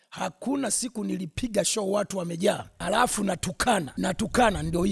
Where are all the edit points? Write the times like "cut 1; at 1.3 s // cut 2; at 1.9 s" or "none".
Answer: cut 1; at 2.7 s // cut 2; at 3.9 s